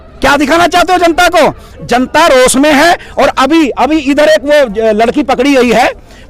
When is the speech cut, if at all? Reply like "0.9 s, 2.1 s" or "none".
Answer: none